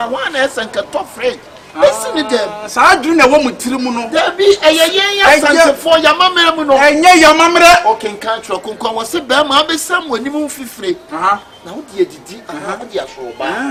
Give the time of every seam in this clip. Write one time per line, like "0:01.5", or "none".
none